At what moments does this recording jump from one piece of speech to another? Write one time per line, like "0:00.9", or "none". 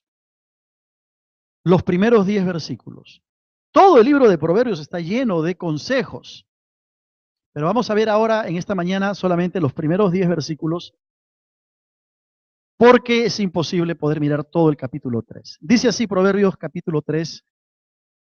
none